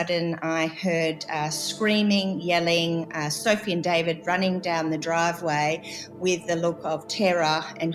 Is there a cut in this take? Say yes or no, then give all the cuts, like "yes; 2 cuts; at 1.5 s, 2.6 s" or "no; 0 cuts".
no; 0 cuts